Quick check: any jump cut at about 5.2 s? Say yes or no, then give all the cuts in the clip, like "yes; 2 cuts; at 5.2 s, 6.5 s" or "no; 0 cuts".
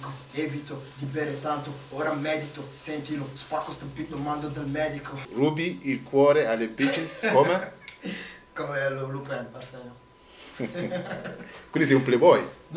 yes; 1 cut; at 5.2 s